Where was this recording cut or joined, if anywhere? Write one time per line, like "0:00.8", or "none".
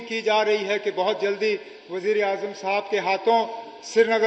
none